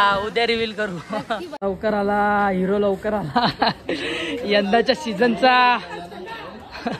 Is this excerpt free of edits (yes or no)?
no